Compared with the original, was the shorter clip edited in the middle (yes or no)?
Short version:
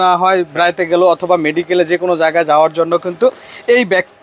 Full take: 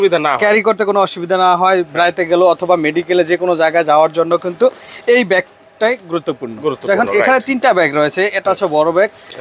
no